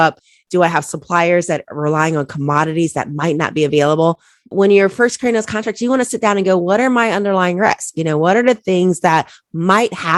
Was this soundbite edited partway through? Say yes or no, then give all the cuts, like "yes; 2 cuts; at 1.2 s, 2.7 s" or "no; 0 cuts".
no; 0 cuts